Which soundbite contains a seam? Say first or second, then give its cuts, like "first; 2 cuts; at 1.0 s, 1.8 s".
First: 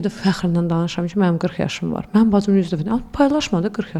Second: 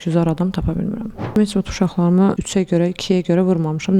second; 2 cuts; at 1.3 s, 2.4 s